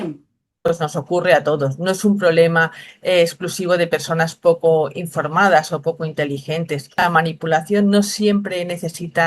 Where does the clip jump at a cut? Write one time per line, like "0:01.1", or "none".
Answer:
0:00.7
0:07.0